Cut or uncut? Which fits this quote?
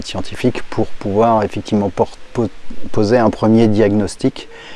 uncut